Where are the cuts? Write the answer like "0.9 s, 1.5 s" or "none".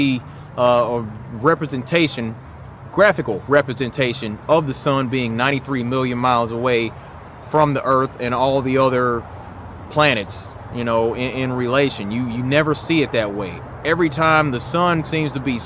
8.6 s